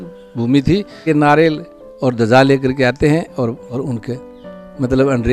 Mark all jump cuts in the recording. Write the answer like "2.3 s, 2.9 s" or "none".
1.0 s, 3.7 s

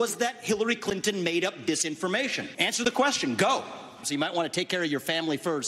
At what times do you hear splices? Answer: 2.5 s, 4.0 s

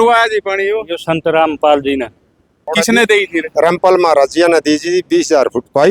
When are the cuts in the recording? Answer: 2.7 s

